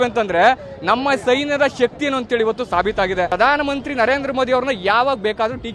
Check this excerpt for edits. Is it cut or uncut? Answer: cut